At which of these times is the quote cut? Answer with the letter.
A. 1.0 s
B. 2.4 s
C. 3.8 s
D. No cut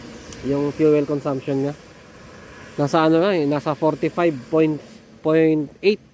D